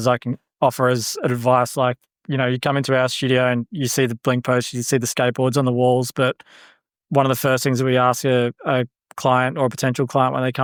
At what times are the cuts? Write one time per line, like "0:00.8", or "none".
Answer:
none